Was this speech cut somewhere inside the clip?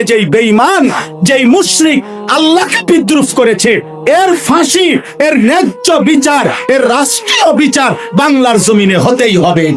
no; 0 cuts

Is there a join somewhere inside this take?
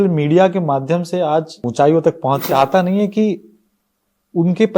yes; 2 cuts; at 1.6 s, 2.5 s

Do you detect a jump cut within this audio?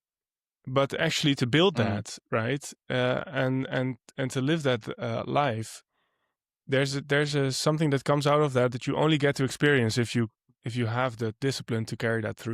no; 0 cuts

